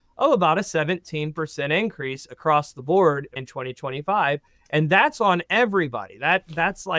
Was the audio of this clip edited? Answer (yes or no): yes